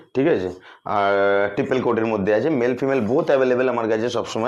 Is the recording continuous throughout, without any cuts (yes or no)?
yes